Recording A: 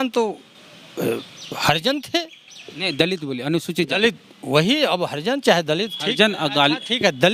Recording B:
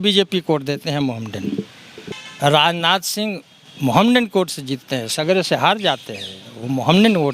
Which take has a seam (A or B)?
B